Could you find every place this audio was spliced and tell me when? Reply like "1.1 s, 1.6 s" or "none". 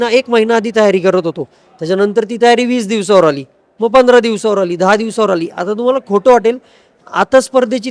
none